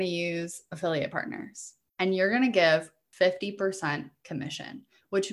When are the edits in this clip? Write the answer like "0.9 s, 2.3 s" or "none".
3.0 s